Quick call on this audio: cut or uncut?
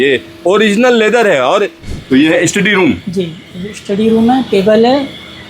cut